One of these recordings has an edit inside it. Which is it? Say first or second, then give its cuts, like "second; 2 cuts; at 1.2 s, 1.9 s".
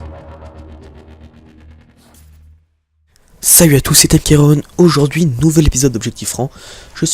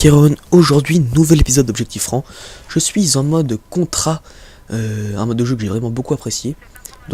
first; 1 cut; at 1.5 s